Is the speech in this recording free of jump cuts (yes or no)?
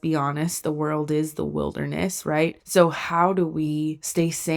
yes